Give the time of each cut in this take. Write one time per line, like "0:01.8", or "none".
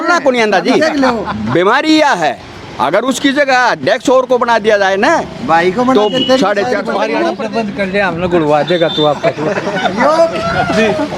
0:07.1